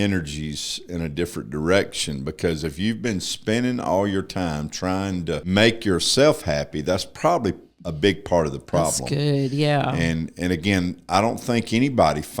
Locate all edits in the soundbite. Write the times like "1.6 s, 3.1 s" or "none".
5.4 s